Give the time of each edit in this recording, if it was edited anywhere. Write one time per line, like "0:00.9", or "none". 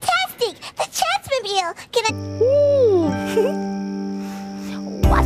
none